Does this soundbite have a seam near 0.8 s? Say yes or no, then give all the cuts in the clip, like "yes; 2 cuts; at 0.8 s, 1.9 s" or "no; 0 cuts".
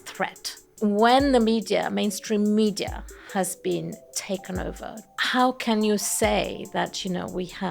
yes; 2 cuts; at 0.8 s, 5.1 s